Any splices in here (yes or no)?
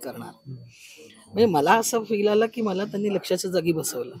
no